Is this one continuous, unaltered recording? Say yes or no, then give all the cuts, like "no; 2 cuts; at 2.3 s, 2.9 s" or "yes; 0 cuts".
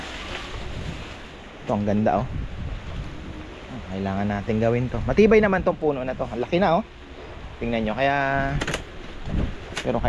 yes; 0 cuts